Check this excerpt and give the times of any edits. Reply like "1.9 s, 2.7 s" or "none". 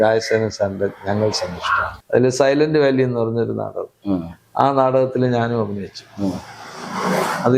1.9 s